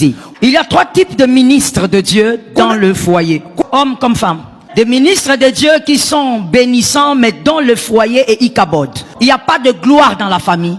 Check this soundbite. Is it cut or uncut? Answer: uncut